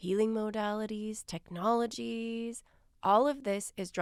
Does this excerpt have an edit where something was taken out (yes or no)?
no